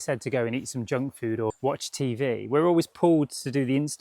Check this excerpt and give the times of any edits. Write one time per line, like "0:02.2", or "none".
0:01.6